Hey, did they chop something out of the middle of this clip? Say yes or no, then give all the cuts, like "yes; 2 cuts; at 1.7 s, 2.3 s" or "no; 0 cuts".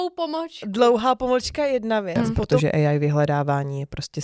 yes; 1 cut; at 2.2 s